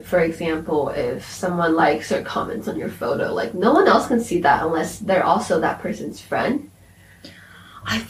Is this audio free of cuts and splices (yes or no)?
yes